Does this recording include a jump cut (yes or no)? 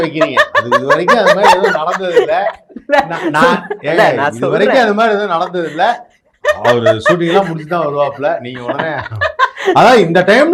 no